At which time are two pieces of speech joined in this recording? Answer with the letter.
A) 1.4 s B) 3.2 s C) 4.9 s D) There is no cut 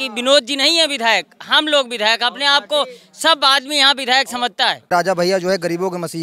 C